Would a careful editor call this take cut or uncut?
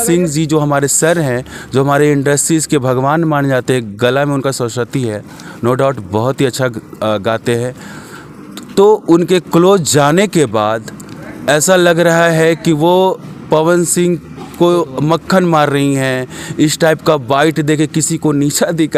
uncut